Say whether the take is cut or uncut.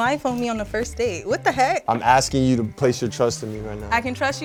uncut